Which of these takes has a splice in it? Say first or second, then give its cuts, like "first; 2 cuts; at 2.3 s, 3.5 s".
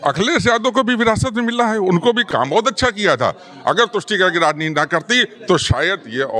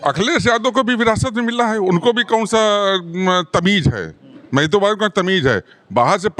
first; 1 cut; at 2.3 s